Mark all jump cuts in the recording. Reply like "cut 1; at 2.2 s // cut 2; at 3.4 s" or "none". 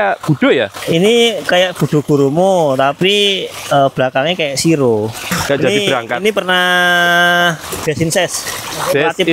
cut 1; at 5.3 s